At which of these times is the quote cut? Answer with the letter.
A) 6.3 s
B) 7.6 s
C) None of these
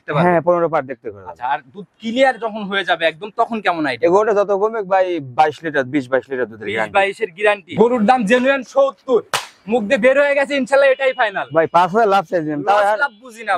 B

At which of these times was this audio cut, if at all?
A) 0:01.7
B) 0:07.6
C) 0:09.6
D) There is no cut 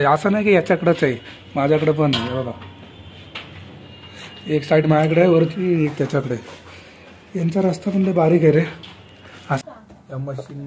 C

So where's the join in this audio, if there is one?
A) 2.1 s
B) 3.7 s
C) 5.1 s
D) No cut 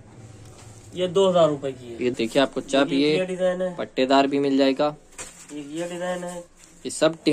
A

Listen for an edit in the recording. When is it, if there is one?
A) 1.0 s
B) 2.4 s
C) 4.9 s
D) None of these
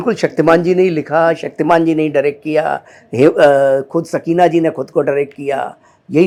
D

